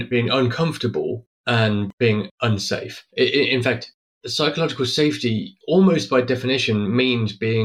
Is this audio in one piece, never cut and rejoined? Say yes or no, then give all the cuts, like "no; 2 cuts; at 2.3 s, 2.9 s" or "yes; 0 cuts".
yes; 0 cuts